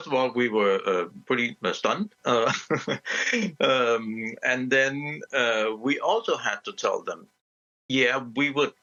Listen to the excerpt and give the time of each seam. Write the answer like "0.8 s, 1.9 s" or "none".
none